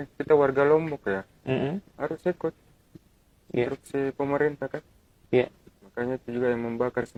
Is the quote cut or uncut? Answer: uncut